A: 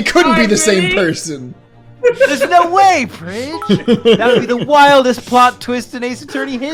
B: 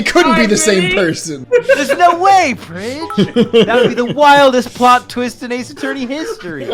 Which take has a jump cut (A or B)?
B